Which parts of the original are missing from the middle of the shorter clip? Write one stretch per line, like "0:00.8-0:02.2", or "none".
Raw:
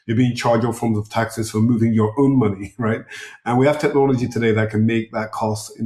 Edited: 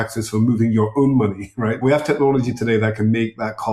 0:03.0-0:03.6